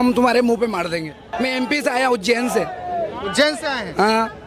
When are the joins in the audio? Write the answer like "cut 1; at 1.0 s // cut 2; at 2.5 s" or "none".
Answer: cut 1; at 1.2 s